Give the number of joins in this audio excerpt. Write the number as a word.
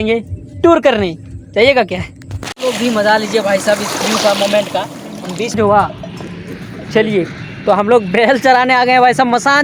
two